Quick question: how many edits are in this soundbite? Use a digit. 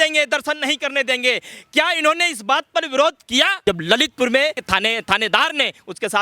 2